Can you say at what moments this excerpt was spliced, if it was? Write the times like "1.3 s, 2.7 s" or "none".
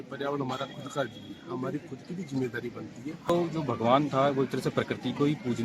3.3 s